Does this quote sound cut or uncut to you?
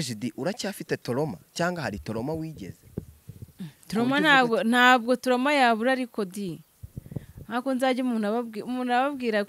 uncut